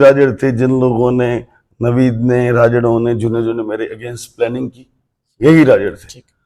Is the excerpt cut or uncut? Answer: uncut